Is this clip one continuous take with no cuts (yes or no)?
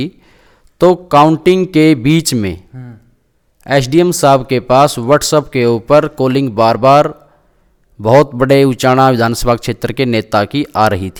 yes